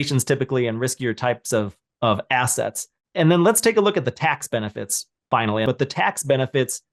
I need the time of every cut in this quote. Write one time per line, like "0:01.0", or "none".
0:05.6